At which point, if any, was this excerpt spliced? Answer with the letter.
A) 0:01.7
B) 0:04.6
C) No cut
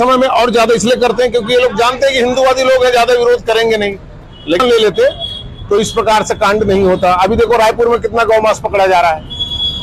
B